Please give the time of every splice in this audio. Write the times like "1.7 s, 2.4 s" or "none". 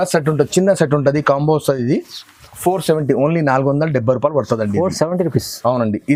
none